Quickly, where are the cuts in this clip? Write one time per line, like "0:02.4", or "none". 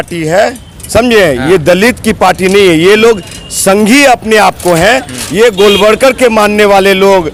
none